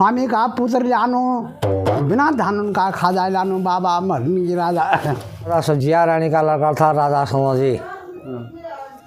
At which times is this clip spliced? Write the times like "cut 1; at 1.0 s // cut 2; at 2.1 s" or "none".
none